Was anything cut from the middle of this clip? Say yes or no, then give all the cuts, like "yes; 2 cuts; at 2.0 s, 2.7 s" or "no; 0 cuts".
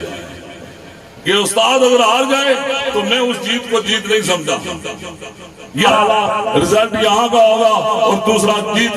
yes; 1 cut; at 5.9 s